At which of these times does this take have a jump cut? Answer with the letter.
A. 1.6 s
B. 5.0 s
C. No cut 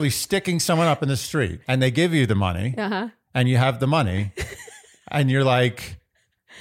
A